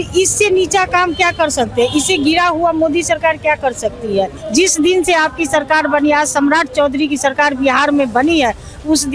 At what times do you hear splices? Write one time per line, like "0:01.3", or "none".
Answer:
0:04.4

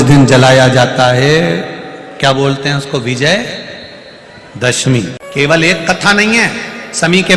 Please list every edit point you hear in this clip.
0:05.2

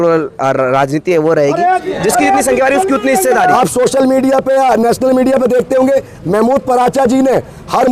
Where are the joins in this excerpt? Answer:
0:01.9
0:03.5

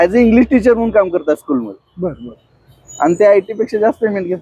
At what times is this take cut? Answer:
none

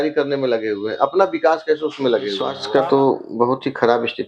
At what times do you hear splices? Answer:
0:02.6

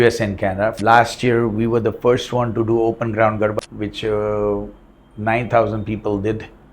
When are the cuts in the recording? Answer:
0:00.8
0:03.6

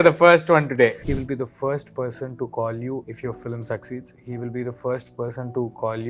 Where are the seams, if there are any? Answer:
0:01.1

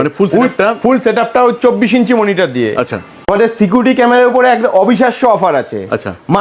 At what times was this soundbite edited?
none

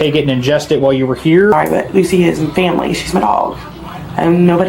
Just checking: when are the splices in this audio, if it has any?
0:01.5

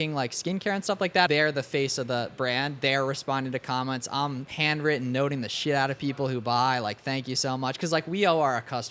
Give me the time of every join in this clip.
0:01.3
0:04.5

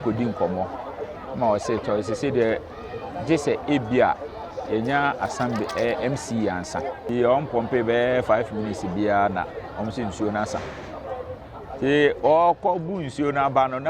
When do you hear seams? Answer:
0:07.0

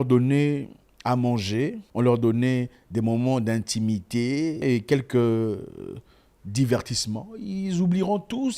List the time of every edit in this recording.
0:01.8
0:04.6

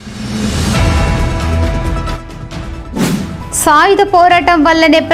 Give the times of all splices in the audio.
0:01.8
0:03.3

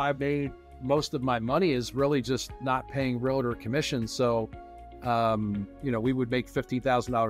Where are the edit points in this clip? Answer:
none

